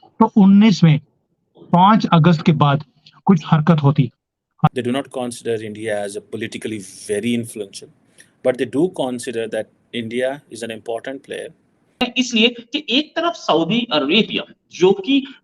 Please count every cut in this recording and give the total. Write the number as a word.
two